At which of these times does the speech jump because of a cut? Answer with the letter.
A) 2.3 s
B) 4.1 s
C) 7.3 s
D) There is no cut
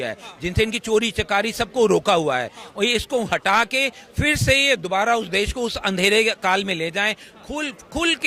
D